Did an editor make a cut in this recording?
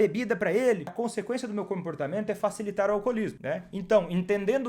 yes; 2 cuts; at 0.9 s, 3.4 s

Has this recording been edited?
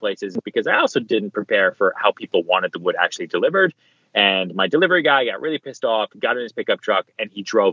no; 0 cuts

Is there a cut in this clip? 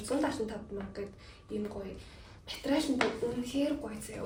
no; 0 cuts

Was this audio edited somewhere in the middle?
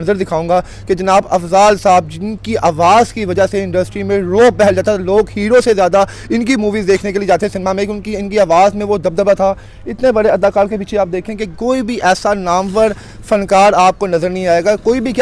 no; 0 cuts

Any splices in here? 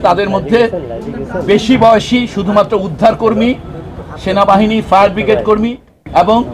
no; 0 cuts

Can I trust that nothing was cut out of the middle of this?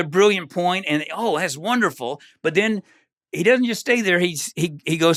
yes; 0 cuts

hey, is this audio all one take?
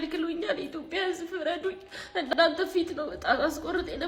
yes; 0 cuts

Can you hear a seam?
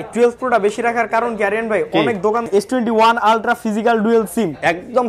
yes; 1 cut; at 2.5 s

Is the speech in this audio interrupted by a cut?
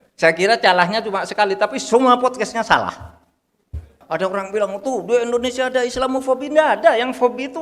yes; 1 cut; at 3.9 s

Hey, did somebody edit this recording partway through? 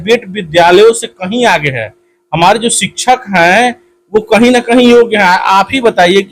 no; 0 cuts

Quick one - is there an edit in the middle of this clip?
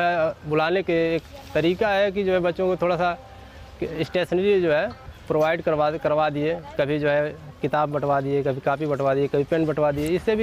no; 0 cuts

